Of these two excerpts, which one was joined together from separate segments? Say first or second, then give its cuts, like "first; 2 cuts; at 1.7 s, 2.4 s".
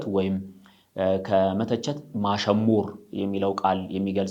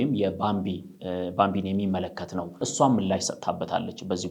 second; 1 cut; at 2.7 s